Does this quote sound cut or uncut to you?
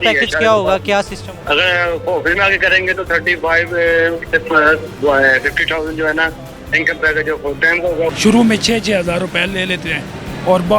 cut